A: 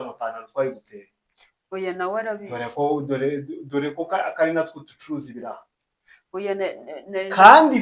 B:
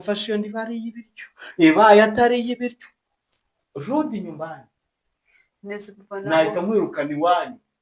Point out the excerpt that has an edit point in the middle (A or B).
A